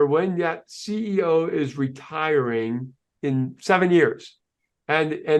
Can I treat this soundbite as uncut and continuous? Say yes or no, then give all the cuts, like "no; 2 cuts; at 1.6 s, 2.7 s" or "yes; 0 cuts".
yes; 0 cuts